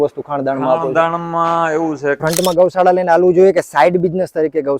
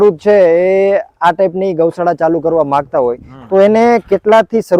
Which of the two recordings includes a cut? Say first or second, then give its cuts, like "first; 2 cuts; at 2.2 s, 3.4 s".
first; 1 cut; at 2.2 s